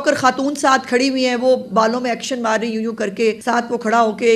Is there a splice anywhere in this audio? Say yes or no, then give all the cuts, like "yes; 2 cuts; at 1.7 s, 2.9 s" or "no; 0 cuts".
yes; 1 cut; at 3.4 s